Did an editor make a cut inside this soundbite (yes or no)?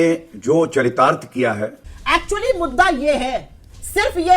yes